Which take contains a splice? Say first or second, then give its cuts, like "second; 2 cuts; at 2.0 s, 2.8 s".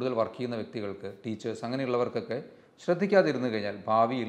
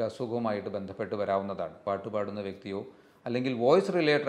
second; 1 cut; at 1.8 s